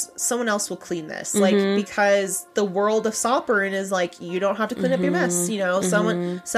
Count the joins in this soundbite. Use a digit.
1